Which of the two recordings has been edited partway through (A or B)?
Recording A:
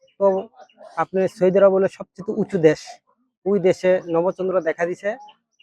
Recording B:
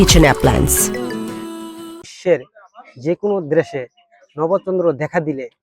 B